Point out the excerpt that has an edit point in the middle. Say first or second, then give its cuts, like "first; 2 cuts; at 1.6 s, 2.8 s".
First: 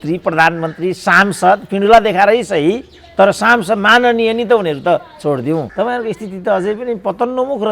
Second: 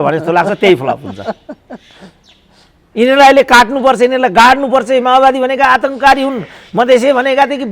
first; 1 cut; at 5.7 s